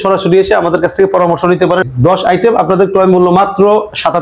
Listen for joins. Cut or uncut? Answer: cut